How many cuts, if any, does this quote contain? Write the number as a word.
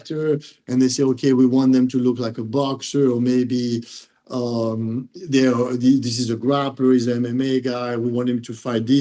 zero